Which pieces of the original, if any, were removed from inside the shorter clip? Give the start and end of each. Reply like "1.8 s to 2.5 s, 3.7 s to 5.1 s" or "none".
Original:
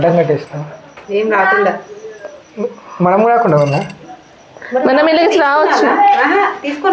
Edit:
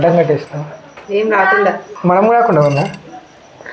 1.9 s to 2.8 s